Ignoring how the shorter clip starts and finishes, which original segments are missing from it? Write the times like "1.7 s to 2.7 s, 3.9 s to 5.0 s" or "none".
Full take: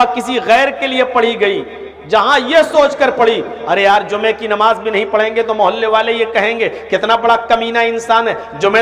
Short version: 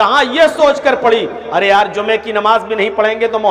none